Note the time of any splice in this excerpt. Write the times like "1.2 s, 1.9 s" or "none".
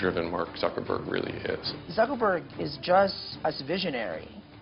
1.7 s, 3.3 s